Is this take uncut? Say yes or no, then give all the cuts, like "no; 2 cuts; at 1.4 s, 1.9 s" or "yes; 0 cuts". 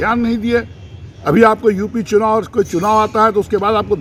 yes; 0 cuts